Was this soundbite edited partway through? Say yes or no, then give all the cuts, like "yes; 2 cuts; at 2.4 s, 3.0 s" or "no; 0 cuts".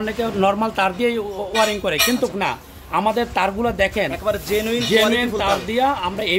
no; 0 cuts